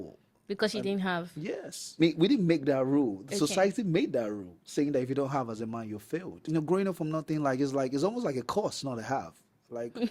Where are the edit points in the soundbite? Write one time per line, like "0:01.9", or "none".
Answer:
0:01.9
0:06.3